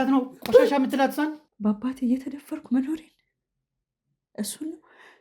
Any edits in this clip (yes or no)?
yes